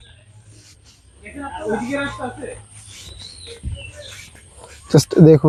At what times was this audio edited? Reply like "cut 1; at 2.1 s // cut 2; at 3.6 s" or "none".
none